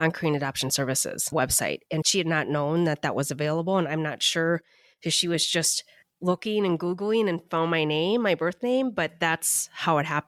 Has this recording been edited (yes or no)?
no